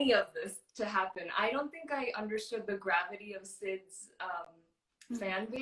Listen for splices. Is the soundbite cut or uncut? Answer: uncut